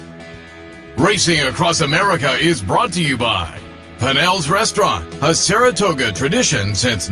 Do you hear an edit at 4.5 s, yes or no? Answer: no